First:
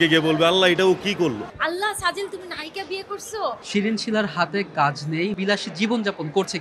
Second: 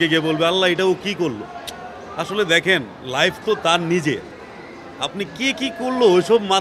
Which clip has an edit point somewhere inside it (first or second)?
first